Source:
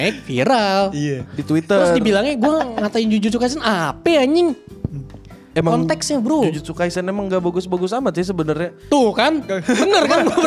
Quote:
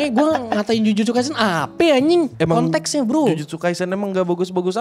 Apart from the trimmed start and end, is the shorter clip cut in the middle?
yes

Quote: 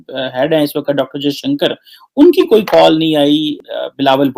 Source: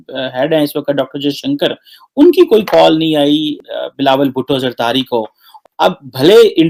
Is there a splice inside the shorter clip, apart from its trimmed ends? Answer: no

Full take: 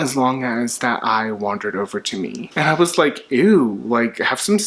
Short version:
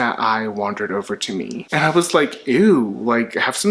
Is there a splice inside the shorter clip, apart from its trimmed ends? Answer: no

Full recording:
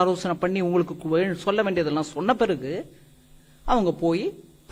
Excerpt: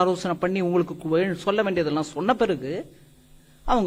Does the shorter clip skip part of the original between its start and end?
no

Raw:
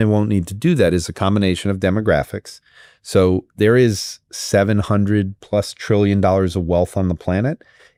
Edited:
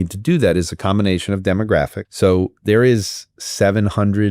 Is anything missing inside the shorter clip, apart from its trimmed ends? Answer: yes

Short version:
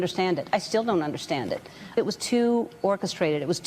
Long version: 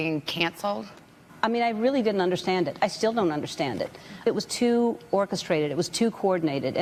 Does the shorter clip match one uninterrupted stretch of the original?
yes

